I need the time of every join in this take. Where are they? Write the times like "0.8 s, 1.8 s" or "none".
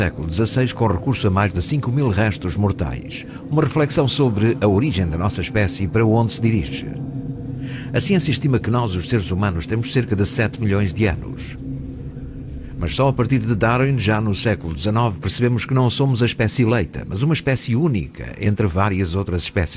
18.5 s